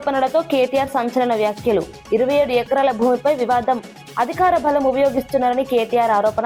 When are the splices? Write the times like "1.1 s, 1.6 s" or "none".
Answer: none